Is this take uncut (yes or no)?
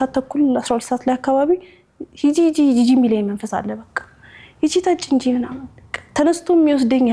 yes